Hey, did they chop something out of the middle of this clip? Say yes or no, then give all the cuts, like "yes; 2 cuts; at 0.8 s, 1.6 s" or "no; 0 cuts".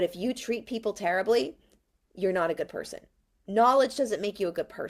no; 0 cuts